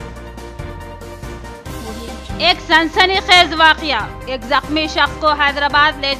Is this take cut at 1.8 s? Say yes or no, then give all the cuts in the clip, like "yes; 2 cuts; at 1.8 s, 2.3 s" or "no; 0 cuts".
yes; 1 cut; at 1.8 s